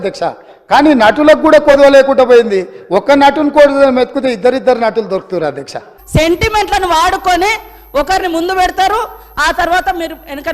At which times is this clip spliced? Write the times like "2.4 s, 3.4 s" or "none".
5.9 s